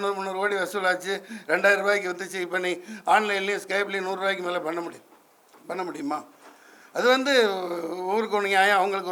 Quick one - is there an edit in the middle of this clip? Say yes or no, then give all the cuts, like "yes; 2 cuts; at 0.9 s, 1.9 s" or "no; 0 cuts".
no; 0 cuts